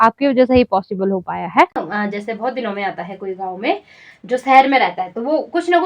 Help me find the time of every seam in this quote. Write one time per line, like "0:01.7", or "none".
0:01.8